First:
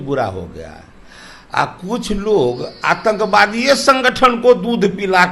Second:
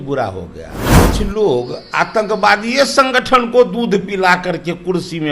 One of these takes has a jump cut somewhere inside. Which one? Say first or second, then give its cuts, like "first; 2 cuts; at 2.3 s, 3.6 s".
second; 1 cut; at 1.0 s